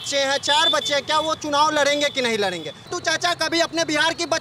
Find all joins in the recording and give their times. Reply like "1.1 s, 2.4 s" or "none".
2.9 s